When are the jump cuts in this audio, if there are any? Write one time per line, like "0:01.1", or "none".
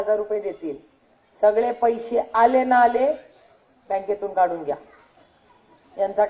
none